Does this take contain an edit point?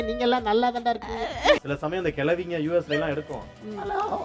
yes; 1 cut; at 1.6 s

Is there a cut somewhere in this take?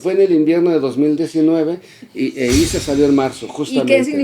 no; 0 cuts

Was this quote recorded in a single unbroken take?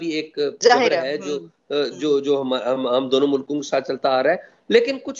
yes; 0 cuts

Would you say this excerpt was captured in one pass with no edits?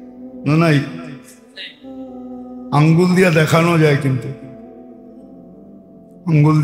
yes; 0 cuts

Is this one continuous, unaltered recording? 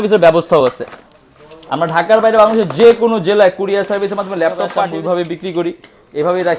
no; 1 cut; at 4.8 s

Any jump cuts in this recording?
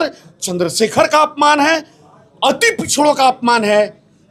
no; 0 cuts

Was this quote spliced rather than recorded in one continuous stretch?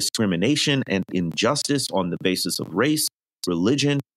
no; 0 cuts

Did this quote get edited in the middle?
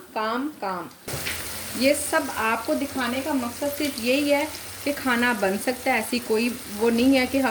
yes; 1 cut; at 1.0 s

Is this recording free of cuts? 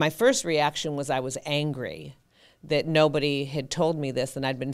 yes; 0 cuts

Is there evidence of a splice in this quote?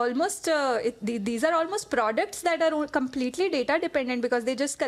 no; 0 cuts

